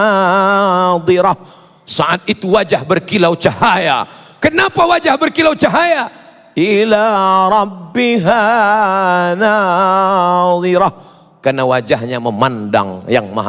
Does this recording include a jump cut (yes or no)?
no